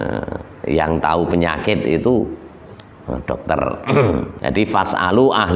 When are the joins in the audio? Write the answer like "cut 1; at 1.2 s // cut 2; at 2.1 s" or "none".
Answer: cut 1; at 4.3 s